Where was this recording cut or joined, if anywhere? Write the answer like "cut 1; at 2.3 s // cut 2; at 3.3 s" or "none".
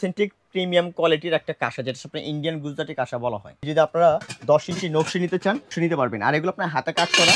cut 1; at 3.7 s // cut 2; at 5.7 s